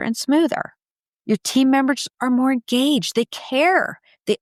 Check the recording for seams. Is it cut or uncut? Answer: uncut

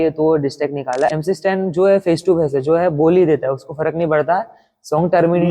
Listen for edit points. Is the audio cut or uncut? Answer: cut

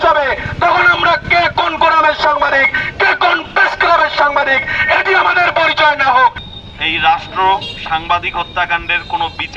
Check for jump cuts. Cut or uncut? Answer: cut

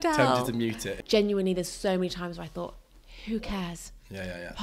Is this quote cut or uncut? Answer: cut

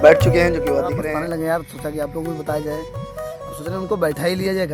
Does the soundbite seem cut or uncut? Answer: cut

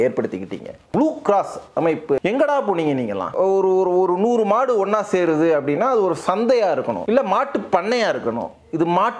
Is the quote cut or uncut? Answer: cut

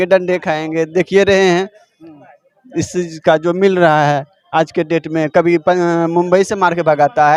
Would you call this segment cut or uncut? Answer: uncut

